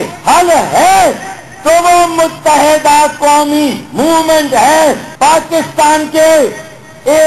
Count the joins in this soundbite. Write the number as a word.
two